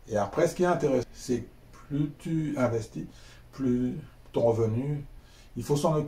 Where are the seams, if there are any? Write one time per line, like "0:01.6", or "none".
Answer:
0:01.0